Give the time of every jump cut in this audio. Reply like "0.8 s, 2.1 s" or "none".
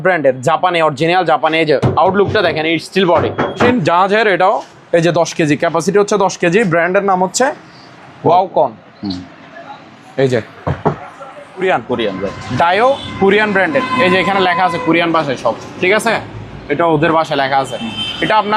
3.7 s, 11.6 s